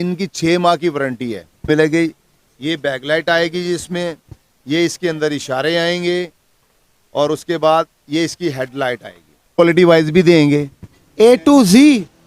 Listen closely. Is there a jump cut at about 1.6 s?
yes; 2 cuts; at 1.6 s, 9.6 s

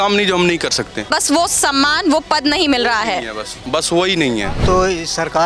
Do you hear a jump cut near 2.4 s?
no; 2 cuts; at 1.1 s, 4.6 s

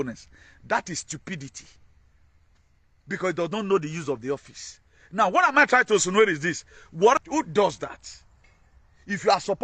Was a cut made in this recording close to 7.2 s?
yes; 1 cut; at 7.2 s

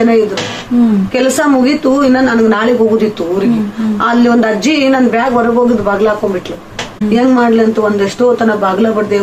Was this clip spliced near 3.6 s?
no; 1 cut; at 7.0 s

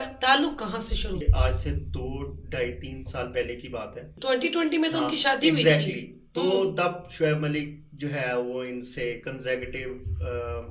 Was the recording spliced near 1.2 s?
yes; 2 cuts; at 1.2 s, 4.1 s

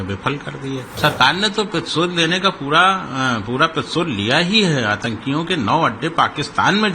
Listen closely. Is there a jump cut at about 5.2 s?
no; 1 cut; at 0.9 s

